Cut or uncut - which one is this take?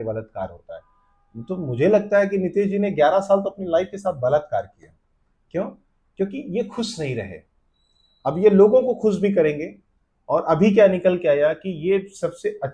uncut